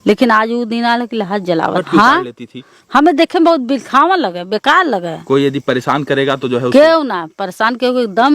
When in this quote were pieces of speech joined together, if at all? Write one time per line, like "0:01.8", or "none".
0:01.8
0:05.1

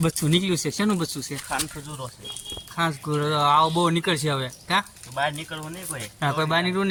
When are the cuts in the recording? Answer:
none

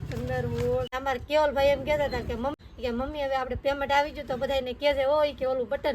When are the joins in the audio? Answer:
0:00.9
0:02.5

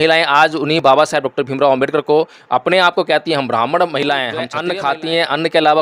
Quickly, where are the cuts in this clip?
0:04.6

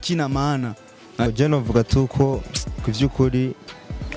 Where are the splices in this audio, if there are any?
0:01.3

